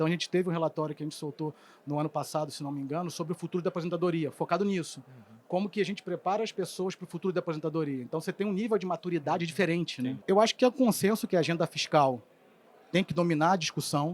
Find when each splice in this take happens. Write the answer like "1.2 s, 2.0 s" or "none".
10.2 s